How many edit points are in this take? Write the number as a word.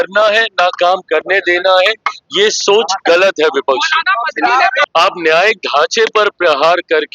one